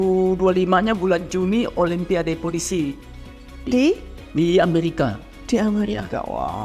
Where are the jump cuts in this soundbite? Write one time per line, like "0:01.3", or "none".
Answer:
none